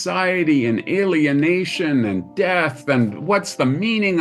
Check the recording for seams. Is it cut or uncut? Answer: uncut